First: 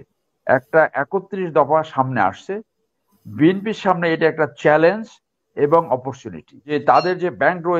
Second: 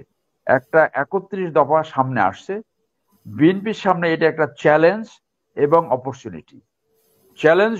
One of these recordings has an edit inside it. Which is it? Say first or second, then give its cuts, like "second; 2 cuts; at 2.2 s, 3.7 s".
first; 1 cut; at 6.7 s